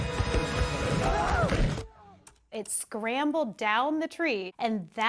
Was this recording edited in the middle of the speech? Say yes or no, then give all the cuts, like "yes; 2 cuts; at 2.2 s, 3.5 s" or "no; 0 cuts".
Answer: yes; 1 cut; at 2.4 s